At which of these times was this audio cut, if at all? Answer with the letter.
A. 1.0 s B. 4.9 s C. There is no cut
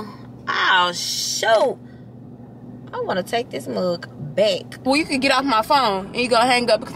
B